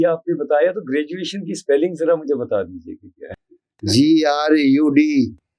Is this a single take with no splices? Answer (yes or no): no